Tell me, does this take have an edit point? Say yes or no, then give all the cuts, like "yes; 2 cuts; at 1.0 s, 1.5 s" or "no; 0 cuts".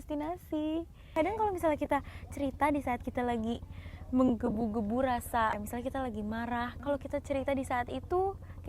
yes; 3 cuts; at 1.0 s, 5.6 s, 6.7 s